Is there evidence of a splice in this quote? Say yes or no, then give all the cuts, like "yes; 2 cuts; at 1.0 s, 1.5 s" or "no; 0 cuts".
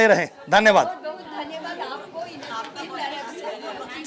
no; 0 cuts